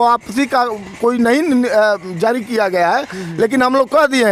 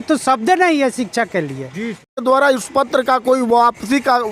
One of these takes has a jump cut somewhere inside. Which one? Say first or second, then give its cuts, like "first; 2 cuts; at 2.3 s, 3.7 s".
second; 1 cut; at 2.2 s